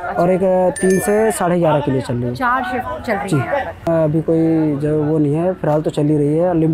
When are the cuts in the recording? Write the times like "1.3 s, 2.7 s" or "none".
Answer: 3.9 s